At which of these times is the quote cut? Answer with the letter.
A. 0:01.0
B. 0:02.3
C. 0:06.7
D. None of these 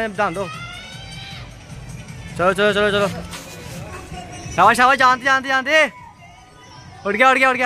B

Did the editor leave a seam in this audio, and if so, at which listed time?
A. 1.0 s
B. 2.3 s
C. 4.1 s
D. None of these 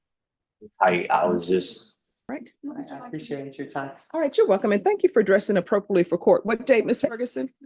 B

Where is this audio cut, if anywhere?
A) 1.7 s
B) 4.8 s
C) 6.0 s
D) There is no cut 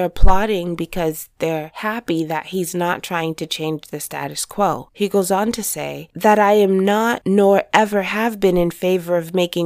B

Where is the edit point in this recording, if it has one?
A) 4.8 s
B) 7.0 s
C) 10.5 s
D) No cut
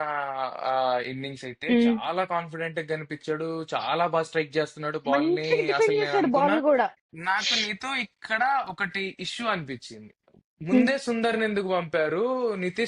B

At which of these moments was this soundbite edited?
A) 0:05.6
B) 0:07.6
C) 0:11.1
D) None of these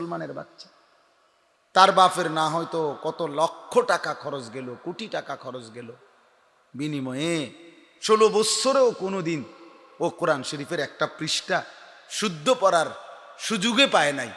D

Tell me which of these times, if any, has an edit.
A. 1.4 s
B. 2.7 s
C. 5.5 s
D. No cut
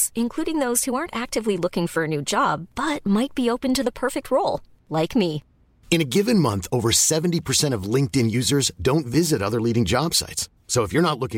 D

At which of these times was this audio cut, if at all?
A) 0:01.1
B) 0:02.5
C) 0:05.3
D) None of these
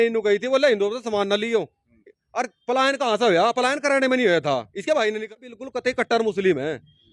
C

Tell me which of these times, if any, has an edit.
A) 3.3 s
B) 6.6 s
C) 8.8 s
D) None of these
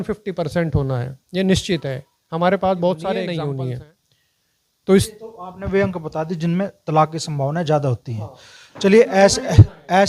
A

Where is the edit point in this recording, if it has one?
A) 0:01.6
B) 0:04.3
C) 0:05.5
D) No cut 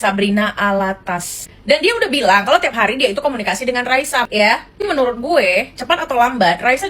B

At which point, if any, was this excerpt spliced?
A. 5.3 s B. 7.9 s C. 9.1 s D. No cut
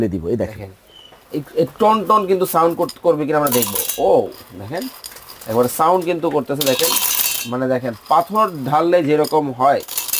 D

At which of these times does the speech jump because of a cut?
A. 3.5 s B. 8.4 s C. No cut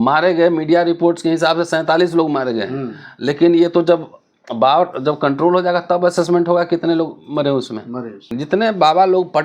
B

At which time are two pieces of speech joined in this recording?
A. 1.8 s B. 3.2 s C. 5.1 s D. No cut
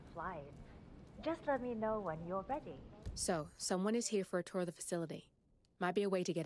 B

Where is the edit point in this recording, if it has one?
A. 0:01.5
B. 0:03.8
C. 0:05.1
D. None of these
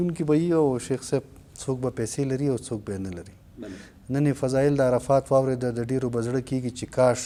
D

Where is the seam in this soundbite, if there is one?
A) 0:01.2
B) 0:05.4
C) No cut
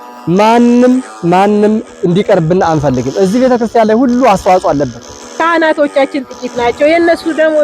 B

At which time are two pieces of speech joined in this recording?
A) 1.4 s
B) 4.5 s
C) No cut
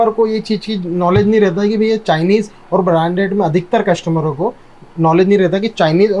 C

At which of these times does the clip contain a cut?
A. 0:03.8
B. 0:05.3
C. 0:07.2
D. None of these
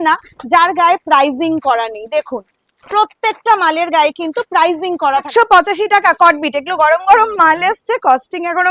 B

